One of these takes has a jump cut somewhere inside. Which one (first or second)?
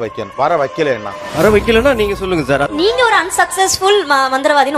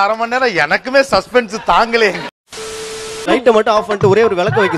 second